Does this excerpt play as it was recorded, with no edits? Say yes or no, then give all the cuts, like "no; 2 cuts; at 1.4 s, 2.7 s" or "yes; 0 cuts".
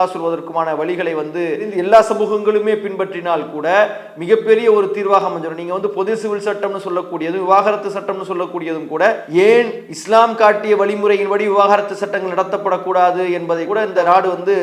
yes; 0 cuts